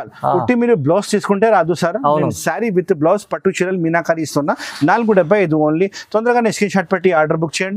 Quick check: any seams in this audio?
no; 0 cuts

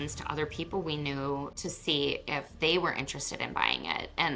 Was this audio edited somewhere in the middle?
yes; 1 cut; at 1.6 s

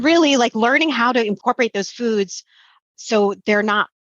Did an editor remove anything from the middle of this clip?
yes; 1 cut; at 1.4 s

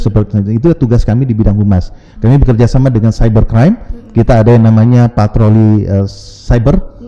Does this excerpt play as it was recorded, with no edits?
yes; 0 cuts

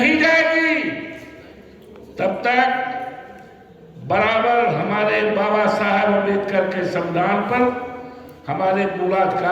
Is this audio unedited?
yes; 0 cuts

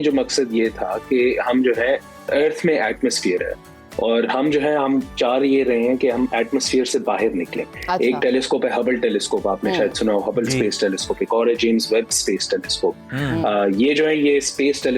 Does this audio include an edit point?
no; 0 cuts

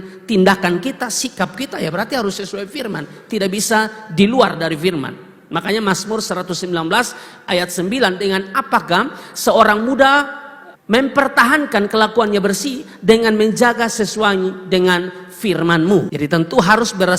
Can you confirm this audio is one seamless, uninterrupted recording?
no; 1 cut; at 16.1 s

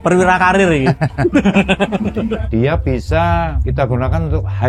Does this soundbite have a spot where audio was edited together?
yes; 2 cuts; at 2.4 s, 3.6 s

